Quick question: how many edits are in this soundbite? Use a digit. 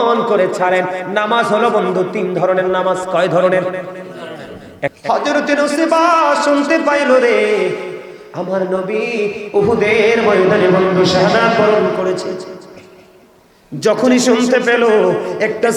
1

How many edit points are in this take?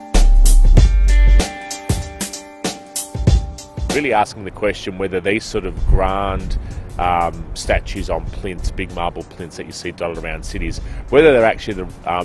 1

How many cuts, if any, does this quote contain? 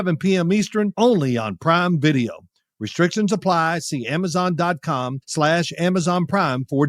1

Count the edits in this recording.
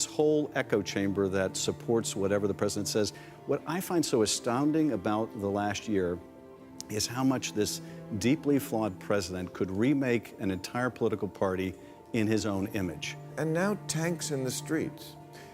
1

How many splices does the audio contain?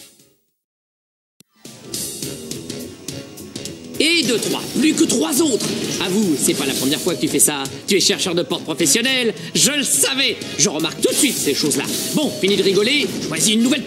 1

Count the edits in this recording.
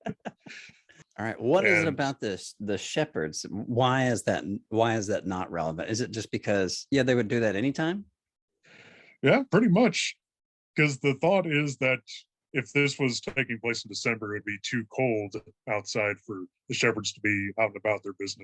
1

